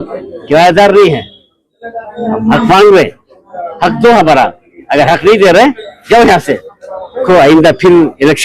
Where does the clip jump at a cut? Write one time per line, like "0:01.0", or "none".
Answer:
0:07.2